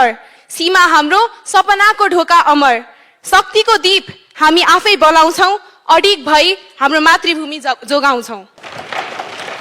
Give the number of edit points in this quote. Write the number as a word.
one